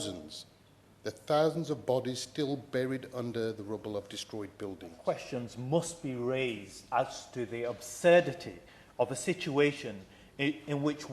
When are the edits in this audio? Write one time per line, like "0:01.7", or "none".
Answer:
0:05.0